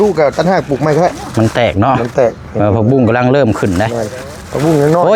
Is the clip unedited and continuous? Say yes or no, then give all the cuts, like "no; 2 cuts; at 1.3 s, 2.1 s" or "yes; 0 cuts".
yes; 0 cuts